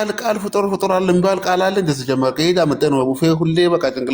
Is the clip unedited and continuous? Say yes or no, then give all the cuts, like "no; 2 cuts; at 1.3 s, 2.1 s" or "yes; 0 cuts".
yes; 0 cuts